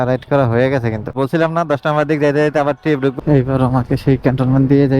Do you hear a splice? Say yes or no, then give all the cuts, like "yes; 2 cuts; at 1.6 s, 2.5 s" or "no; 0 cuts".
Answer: yes; 2 cuts; at 1.1 s, 3.1 s